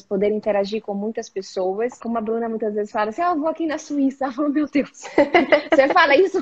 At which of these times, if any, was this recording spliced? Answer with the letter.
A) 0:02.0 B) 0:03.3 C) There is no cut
A